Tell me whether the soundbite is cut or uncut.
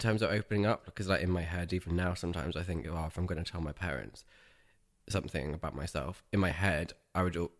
uncut